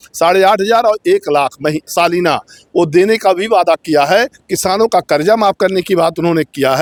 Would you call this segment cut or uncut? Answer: uncut